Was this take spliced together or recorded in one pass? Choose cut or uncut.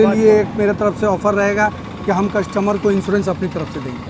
uncut